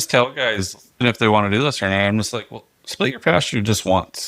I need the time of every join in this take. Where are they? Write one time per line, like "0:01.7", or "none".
0:01.0